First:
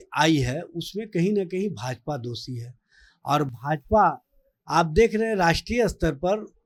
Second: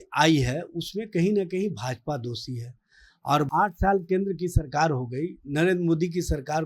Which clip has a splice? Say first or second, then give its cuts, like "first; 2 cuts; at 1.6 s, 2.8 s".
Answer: second; 1 cut; at 3.5 s